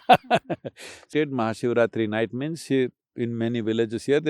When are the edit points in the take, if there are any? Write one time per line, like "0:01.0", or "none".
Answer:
0:01.1

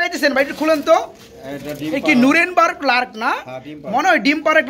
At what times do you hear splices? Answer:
none

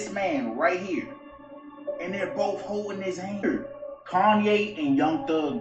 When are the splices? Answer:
0:03.4

